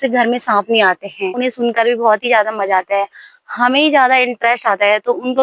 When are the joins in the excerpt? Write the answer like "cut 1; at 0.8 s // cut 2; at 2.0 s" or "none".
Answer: cut 1; at 1.3 s